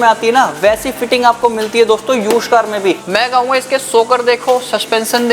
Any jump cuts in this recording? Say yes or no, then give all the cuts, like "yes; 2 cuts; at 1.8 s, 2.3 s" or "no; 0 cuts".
yes; 1 cut; at 3.0 s